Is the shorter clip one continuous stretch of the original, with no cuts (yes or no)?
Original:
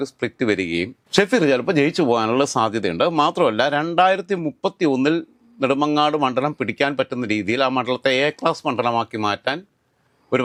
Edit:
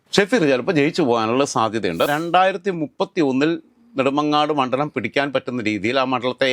no